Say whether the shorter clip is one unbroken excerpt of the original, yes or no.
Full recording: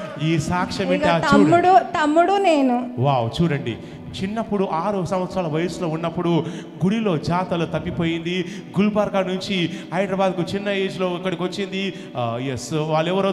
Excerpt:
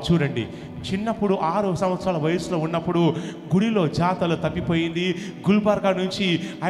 yes